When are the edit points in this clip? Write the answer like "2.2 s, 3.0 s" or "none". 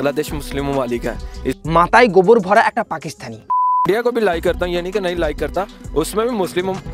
3.8 s